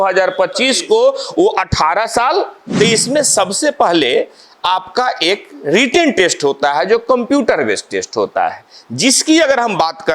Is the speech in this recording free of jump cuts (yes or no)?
no